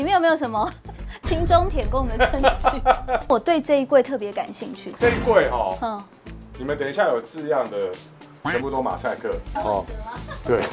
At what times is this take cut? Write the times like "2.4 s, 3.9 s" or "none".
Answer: 9.4 s